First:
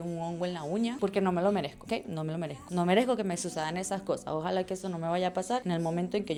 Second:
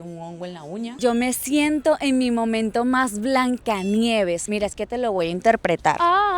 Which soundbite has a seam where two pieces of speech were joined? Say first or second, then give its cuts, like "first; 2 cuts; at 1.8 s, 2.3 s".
second; 2 cuts; at 1.0 s, 4.4 s